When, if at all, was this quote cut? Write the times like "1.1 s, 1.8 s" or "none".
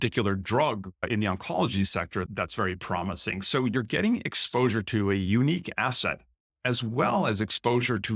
2.3 s